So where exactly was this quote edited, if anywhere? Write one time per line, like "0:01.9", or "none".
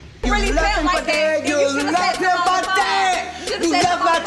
none